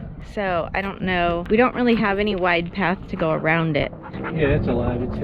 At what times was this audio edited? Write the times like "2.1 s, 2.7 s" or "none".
1.4 s